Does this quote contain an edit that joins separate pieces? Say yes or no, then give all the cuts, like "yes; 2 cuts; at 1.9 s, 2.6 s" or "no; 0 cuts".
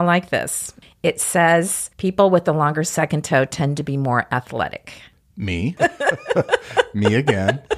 yes; 1 cut; at 1.8 s